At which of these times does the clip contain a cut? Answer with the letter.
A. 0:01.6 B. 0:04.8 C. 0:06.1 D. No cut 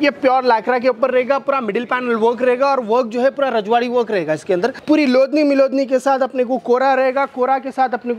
B